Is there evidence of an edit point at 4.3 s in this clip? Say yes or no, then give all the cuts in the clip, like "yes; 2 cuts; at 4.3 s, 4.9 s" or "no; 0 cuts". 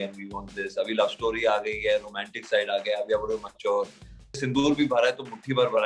yes; 1 cut; at 4.3 s